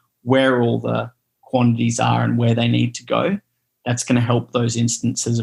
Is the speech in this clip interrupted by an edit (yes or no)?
no